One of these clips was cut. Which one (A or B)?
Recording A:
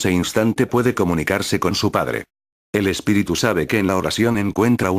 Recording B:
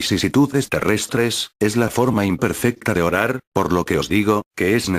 A